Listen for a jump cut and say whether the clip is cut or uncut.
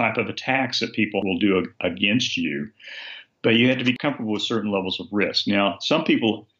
cut